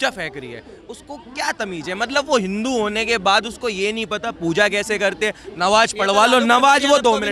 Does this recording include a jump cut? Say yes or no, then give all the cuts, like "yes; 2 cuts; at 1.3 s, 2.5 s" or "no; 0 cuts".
no; 0 cuts